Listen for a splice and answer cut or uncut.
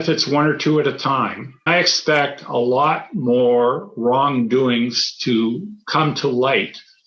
cut